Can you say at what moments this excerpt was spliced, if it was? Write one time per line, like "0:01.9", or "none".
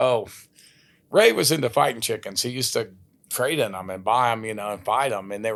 none